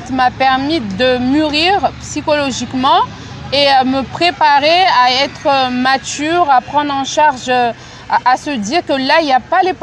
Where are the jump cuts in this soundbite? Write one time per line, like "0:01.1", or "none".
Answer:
none